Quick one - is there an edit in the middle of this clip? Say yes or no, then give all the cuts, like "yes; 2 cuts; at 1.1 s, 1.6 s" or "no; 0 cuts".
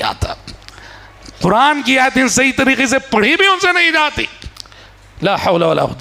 no; 0 cuts